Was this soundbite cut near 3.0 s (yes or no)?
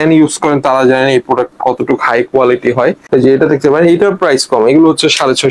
yes